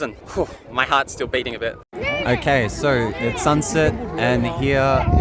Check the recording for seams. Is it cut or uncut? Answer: uncut